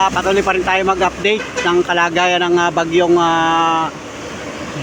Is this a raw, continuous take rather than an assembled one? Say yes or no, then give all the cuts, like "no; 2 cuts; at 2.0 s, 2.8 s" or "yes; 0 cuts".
yes; 0 cuts